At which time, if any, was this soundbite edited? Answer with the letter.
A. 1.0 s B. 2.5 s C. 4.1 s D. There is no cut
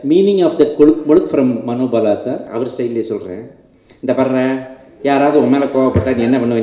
B